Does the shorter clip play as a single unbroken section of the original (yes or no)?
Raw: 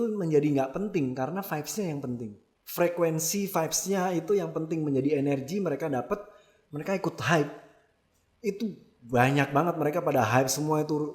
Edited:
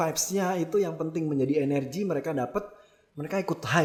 yes